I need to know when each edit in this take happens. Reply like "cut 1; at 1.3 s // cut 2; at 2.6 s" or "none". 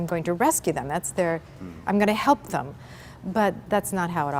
none